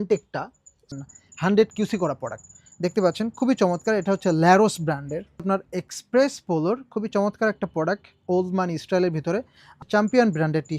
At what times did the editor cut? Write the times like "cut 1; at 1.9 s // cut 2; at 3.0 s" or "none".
cut 1; at 0.9 s // cut 2; at 5.4 s // cut 3; at 9.8 s